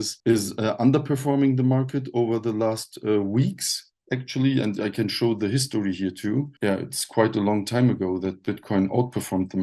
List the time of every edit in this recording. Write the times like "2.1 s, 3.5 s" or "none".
none